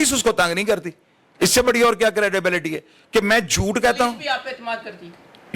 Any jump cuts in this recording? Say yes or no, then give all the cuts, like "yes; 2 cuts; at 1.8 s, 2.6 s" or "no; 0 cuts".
no; 0 cuts